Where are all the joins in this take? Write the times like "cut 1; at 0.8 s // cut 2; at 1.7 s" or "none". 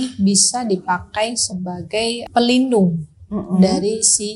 cut 1; at 2.2 s